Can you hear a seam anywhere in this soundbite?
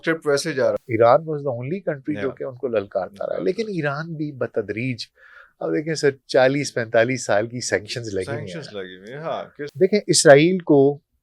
yes; 2 cuts; at 0.8 s, 9.7 s

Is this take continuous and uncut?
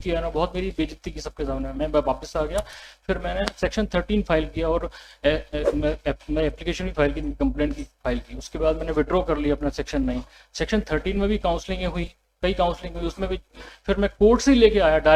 yes; 0 cuts

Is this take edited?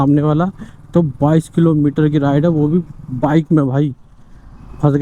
no; 0 cuts

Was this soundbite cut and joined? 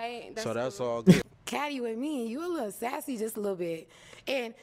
yes; 1 cut; at 1.2 s

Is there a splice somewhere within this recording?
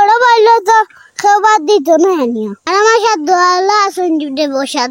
yes; 1 cut; at 2.5 s

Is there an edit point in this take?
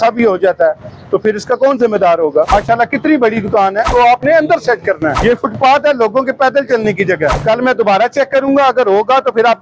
yes; 4 cuts; at 2.5 s, 3.9 s, 5.2 s, 7.4 s

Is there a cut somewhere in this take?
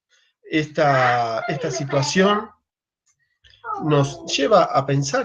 yes; 1 cut; at 1.4 s

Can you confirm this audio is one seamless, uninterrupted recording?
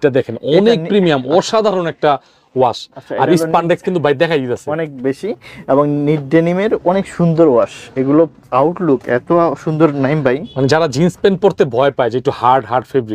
yes; 0 cuts

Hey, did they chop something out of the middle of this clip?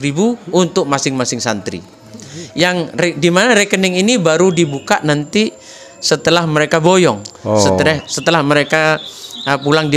no; 0 cuts

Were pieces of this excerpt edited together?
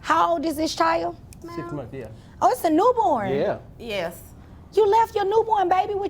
yes; 1 cut; at 1.4 s

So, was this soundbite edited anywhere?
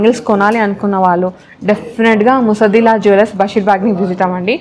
no; 0 cuts

